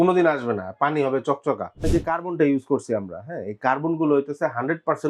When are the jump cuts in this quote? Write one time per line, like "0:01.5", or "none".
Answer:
0:01.9